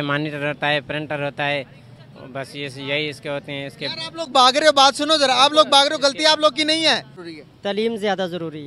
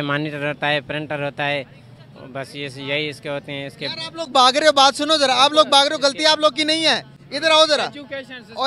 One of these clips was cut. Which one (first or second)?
first